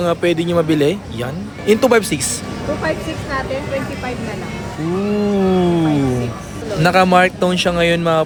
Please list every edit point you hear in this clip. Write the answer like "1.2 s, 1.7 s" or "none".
none